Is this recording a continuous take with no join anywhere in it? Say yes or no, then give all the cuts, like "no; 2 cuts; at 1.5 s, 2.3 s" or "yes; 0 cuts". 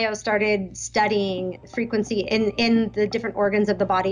yes; 0 cuts